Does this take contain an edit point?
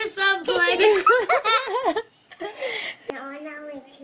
yes; 1 cut; at 2.9 s

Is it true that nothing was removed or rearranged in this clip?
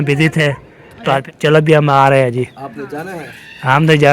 no; 1 cut; at 1.2 s

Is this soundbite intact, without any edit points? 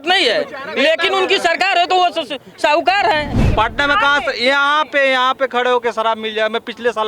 no; 1 cut; at 3.3 s

